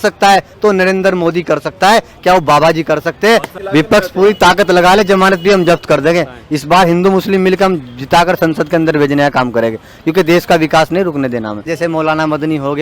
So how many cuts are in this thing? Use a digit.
2